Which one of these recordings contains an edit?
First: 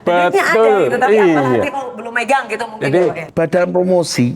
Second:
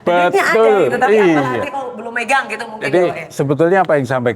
first; 1 cut; at 3.2 s

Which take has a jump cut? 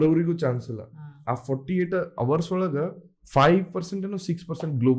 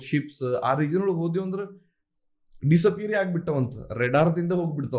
first; 1 cut; at 3.1 s

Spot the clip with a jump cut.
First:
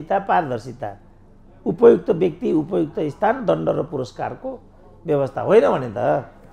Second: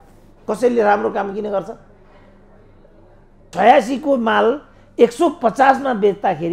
second; 1 cut; at 3.5 s

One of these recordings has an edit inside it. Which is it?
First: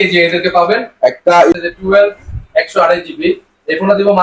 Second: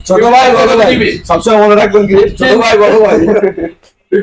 first; 1 cut; at 1.5 s

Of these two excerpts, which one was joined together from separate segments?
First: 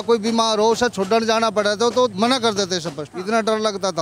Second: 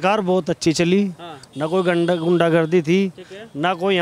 first; 1 cut; at 3.1 s

